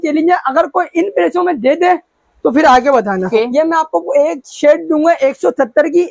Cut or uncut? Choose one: cut